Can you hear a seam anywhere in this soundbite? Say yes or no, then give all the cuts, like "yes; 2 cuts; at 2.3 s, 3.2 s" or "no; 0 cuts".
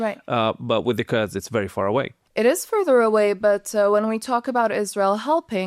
yes; 1 cut; at 2.2 s